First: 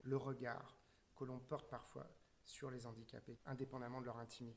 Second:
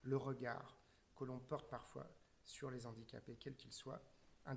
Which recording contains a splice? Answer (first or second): first